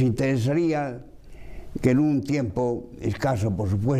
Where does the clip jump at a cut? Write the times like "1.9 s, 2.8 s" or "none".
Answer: 2.2 s